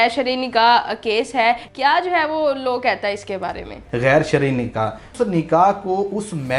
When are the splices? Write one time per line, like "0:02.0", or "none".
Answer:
0:01.7
0:03.8
0:05.0